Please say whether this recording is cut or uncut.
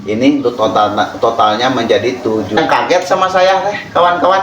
cut